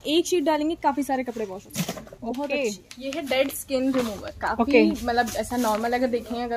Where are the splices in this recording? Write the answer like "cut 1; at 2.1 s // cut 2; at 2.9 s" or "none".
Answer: cut 1; at 2.9 s